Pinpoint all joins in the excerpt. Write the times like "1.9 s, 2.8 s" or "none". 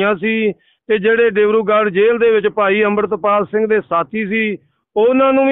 none